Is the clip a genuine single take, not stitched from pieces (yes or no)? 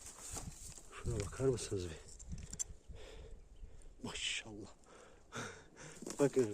no